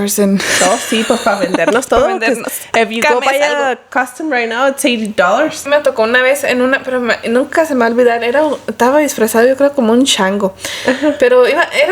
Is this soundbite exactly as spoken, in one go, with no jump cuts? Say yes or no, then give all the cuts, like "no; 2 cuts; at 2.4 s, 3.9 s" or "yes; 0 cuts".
no; 1 cut; at 5.6 s